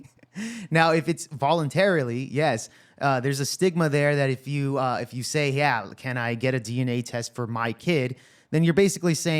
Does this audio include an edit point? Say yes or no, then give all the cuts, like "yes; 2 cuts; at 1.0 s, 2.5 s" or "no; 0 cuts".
no; 0 cuts